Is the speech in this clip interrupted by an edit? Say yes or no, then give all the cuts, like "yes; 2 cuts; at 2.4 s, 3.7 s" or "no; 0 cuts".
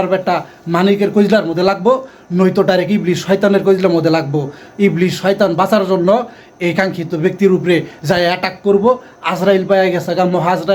no; 0 cuts